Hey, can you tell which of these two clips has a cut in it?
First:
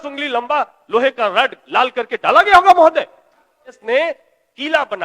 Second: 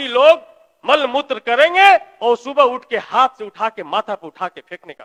first; 1 cut; at 3.8 s

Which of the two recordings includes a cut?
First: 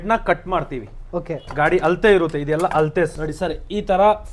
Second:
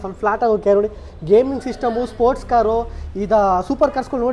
first; 1 cut; at 3.2 s

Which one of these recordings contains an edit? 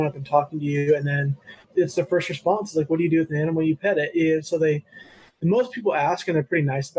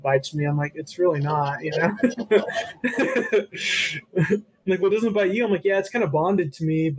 first; 1 cut; at 1.6 s

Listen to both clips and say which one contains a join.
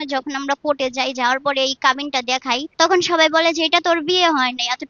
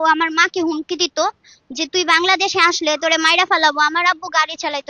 first; 1 cut; at 2.7 s

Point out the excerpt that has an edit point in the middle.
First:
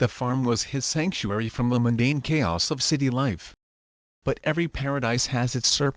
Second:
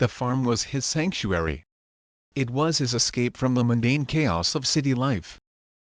first; 2 cuts; at 1.7 s, 5.0 s

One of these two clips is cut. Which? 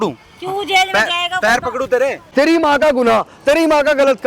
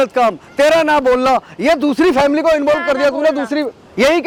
first; 1 cut; at 2.2 s

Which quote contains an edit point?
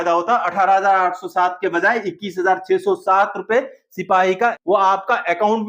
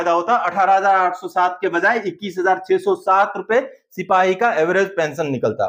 first; 1 cut; at 4.5 s

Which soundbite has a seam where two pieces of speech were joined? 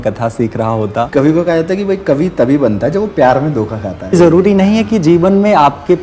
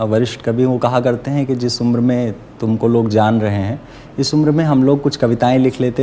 first; 2 cuts; at 1.1 s, 4.2 s

